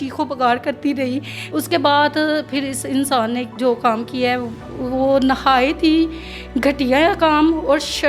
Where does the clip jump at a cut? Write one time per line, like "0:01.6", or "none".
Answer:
0:01.4